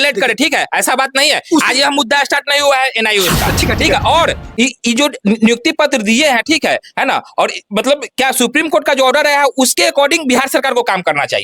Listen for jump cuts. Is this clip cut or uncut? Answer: cut